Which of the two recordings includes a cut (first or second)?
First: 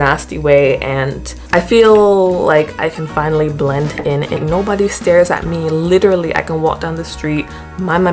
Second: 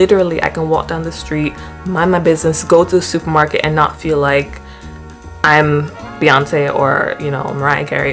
first